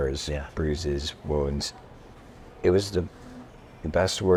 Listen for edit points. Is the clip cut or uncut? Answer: uncut